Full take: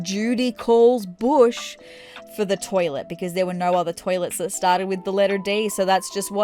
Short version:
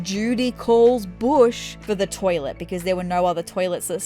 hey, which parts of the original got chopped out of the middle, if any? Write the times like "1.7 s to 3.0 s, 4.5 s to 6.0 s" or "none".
1.7 s to 2.2 s